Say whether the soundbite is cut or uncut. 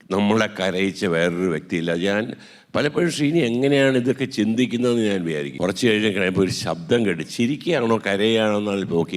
cut